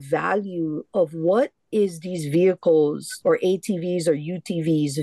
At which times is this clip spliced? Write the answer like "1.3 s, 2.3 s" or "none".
none